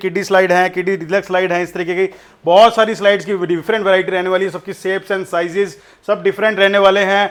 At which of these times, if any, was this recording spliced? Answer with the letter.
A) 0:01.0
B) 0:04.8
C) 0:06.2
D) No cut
D